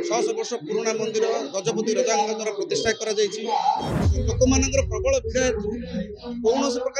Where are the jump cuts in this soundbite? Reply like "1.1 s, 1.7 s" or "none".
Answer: 4.0 s